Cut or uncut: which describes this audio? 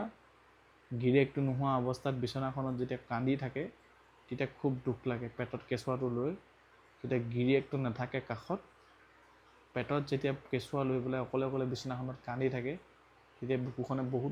uncut